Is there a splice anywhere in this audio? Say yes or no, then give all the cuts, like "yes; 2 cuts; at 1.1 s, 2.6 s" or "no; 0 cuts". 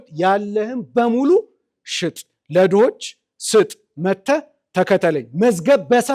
no; 0 cuts